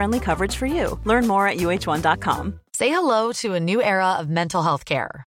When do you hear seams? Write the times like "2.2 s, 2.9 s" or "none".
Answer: 2.6 s